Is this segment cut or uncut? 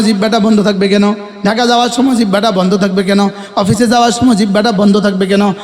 uncut